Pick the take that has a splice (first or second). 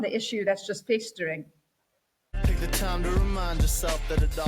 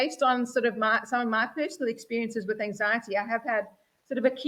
first